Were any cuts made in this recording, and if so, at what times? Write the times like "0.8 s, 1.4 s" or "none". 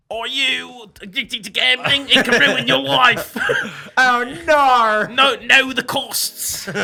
none